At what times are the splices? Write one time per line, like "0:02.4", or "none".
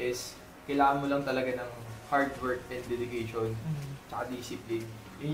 none